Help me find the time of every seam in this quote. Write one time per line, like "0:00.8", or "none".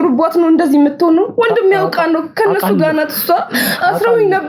none